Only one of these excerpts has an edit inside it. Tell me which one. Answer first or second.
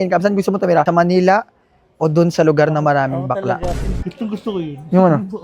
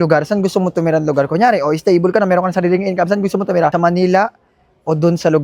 first